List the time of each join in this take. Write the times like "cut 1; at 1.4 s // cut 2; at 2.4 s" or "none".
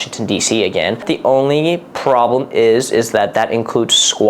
cut 1; at 1.0 s

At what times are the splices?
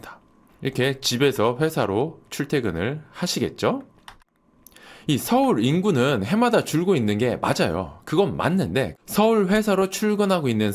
cut 1; at 4.5 s // cut 2; at 8.9 s

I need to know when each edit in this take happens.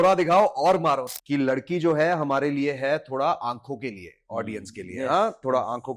cut 1; at 1.1 s

